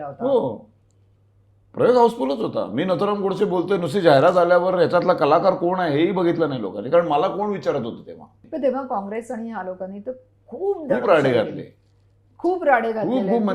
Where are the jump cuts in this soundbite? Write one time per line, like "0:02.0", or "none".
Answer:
0:08.4